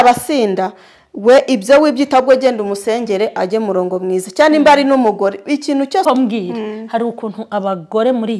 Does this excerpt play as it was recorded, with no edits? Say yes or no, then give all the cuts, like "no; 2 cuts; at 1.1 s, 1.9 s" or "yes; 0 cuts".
no; 1 cut; at 6.1 s